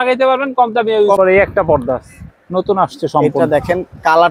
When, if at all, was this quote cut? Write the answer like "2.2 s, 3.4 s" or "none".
1.2 s